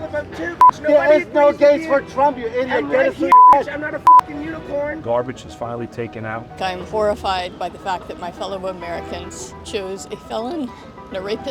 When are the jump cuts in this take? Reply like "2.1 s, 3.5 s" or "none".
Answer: 5.0 s, 6.6 s